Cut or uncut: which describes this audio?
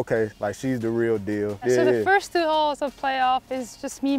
cut